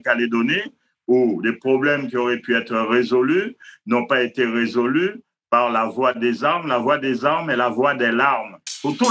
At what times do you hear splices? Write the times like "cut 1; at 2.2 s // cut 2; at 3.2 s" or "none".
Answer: none